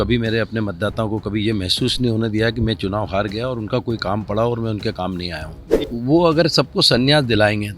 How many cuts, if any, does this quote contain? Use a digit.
1